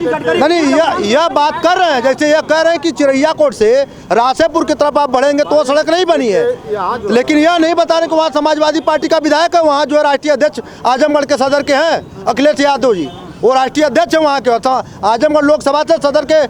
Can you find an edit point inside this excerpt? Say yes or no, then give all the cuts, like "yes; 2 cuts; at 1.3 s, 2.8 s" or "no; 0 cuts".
no; 0 cuts